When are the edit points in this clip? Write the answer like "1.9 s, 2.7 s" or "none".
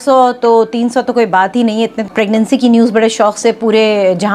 2.1 s